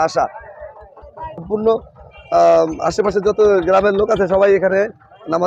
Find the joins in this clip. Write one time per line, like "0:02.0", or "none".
0:01.4